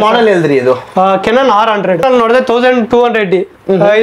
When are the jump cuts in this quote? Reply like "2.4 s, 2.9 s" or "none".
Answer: 2.0 s

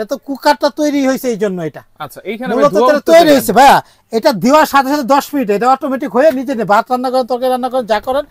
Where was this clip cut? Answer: none

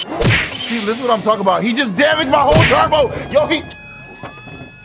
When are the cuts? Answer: none

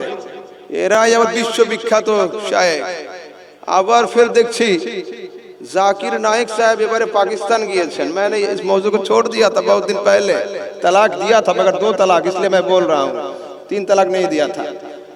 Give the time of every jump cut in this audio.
none

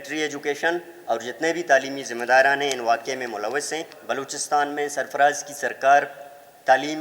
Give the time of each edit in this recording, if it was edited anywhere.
3.9 s

